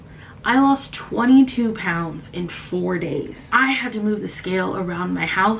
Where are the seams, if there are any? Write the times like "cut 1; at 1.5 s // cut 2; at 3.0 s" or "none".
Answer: none